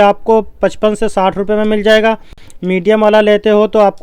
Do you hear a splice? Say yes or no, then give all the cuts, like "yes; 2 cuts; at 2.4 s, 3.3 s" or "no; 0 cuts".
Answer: no; 0 cuts